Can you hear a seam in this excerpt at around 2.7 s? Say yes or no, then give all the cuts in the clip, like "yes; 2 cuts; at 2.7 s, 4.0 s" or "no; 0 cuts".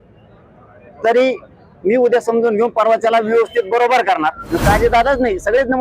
no; 1 cut; at 4.5 s